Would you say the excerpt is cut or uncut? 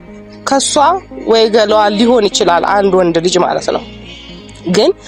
uncut